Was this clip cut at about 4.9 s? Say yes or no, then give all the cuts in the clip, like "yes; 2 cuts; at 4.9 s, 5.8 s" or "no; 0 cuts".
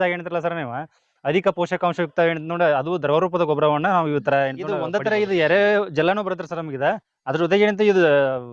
yes; 1 cut; at 4.9 s